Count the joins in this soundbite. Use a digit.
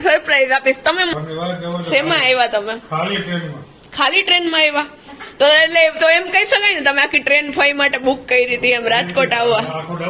1